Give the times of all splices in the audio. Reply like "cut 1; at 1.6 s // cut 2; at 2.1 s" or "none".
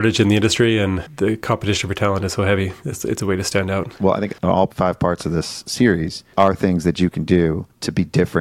cut 1; at 1.1 s // cut 2; at 3.9 s